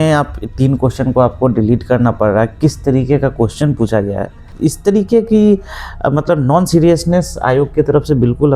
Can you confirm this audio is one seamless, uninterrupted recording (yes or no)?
no